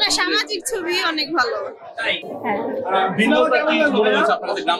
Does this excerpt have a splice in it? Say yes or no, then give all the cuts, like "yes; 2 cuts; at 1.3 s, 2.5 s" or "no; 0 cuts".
no; 0 cuts